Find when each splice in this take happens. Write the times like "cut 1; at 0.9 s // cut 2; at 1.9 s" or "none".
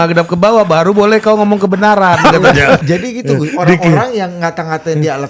cut 1; at 2.8 s